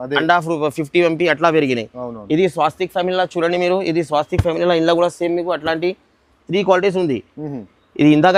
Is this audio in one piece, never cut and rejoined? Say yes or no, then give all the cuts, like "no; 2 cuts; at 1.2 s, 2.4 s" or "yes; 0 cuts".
yes; 0 cuts